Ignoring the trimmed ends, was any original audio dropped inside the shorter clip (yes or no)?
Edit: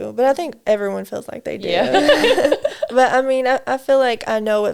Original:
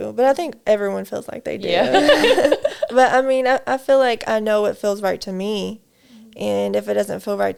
no